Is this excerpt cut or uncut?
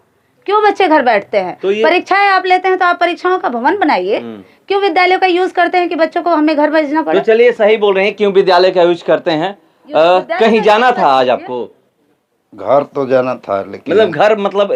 uncut